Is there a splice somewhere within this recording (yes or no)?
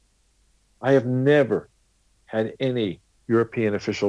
yes